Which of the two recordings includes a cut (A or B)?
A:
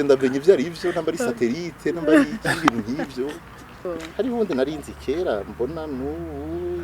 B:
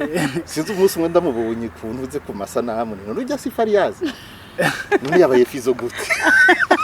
A